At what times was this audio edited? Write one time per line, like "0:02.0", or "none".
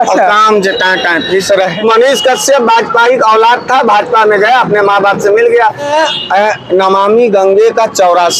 0:01.7
0:05.9